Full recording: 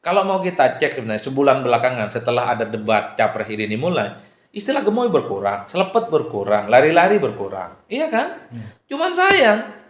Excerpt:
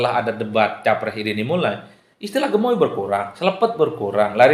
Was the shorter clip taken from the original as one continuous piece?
yes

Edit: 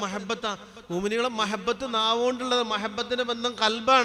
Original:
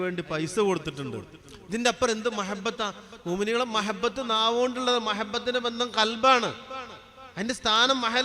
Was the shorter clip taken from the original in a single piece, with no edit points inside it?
yes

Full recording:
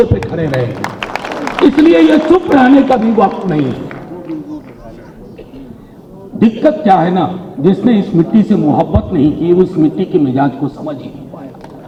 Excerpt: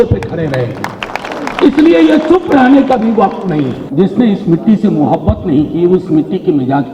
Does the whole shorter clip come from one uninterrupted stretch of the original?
no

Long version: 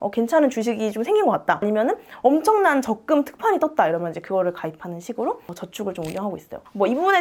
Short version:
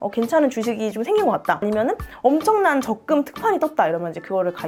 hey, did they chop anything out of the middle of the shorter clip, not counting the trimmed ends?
no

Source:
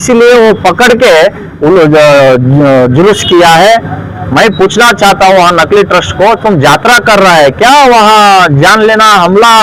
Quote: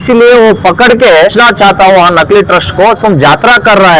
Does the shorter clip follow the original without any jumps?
no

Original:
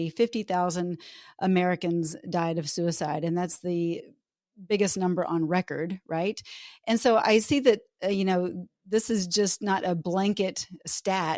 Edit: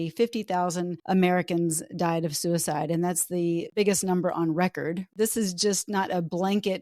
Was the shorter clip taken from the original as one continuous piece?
no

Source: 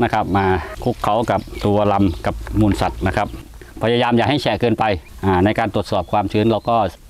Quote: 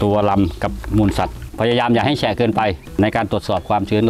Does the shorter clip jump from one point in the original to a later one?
yes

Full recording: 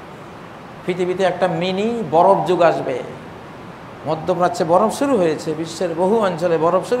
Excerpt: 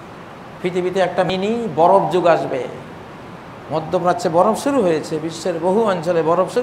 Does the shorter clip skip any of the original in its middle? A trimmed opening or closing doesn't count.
yes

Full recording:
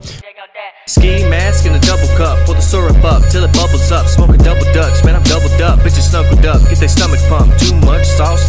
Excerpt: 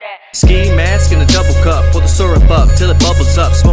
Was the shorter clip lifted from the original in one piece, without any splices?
yes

